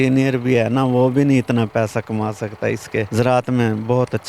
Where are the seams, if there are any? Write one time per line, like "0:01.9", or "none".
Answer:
0:03.1